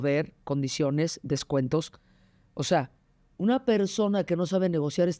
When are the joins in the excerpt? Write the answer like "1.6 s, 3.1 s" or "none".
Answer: none